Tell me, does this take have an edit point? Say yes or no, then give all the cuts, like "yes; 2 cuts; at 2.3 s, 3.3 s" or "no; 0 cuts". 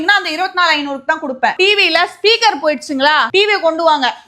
yes; 1 cut; at 1.5 s